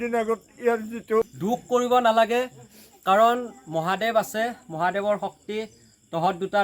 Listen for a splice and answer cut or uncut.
cut